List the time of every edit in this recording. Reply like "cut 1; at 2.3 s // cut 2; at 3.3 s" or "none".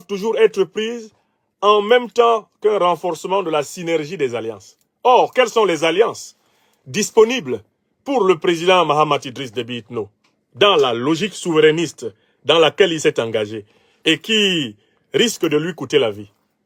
none